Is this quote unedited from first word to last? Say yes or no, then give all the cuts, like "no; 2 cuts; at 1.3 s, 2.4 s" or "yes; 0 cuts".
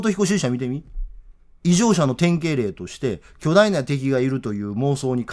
yes; 0 cuts